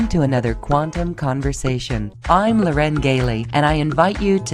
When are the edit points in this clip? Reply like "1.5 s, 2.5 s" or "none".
2.1 s